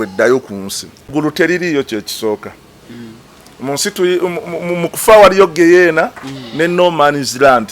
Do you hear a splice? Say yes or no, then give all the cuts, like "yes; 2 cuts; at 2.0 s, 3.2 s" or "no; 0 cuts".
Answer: yes; 1 cut; at 1.1 s